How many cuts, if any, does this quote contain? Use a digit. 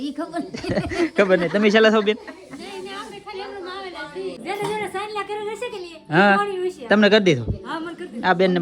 1